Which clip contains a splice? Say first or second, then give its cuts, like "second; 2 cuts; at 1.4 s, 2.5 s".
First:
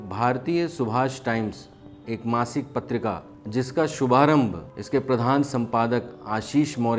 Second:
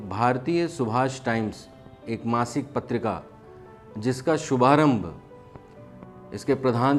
first; 2 cuts; at 3.3 s, 4.7 s